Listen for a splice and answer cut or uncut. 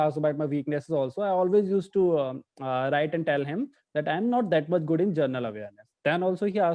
uncut